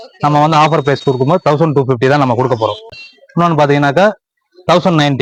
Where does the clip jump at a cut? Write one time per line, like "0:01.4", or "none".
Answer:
none